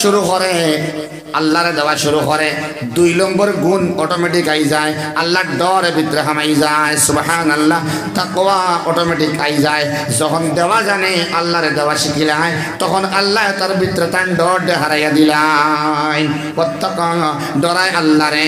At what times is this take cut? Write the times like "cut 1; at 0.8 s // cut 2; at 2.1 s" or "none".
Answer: none